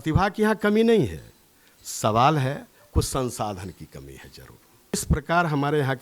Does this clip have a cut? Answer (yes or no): yes